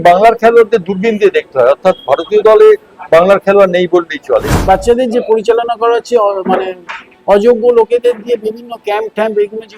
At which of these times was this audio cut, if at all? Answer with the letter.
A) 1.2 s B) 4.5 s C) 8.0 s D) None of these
B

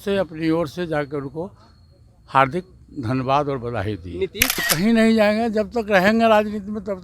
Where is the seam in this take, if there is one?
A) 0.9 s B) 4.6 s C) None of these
B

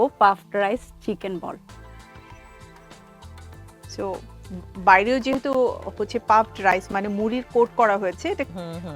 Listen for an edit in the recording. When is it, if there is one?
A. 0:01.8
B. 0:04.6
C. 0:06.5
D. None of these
A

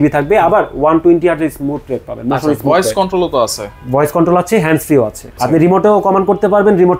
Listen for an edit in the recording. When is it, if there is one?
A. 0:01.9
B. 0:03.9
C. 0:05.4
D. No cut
C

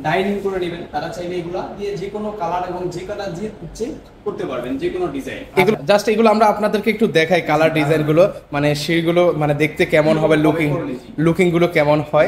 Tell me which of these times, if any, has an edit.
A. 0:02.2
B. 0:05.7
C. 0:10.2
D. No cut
B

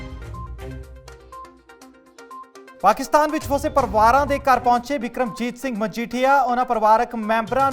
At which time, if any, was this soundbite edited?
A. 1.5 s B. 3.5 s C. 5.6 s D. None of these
A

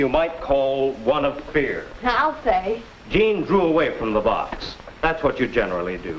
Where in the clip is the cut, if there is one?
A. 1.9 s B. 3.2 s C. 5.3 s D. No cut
A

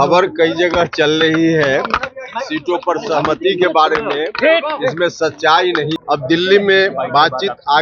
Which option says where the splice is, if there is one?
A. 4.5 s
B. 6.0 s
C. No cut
B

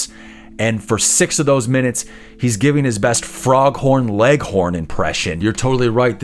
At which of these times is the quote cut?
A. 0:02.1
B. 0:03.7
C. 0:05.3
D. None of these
C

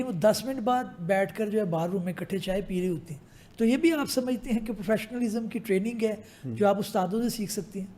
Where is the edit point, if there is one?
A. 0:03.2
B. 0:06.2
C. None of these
C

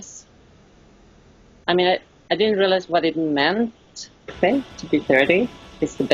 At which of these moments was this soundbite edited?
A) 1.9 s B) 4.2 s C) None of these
C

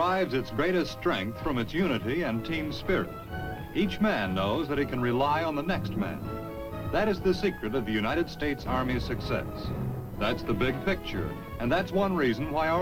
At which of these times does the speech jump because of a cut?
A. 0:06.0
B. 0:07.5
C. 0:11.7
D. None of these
D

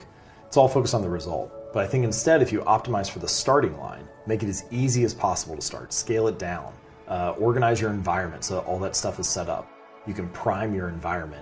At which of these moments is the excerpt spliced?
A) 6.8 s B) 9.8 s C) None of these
B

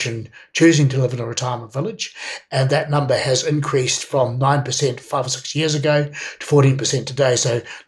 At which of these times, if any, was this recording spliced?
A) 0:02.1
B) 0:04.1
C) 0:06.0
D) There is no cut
D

